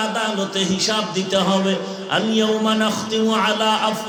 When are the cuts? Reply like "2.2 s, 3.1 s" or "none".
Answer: none